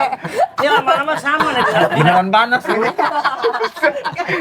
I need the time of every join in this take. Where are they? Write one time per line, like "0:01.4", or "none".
0:02.0